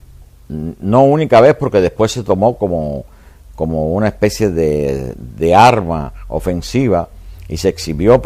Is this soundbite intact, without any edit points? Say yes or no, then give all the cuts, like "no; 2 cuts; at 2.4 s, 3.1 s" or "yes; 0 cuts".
yes; 0 cuts